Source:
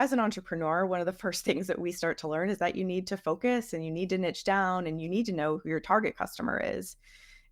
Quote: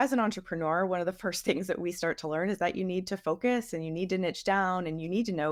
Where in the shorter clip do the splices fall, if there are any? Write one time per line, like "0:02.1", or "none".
none